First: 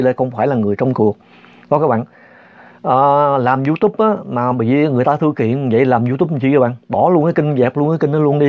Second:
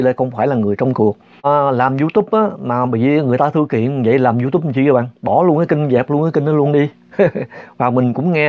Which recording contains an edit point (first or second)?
second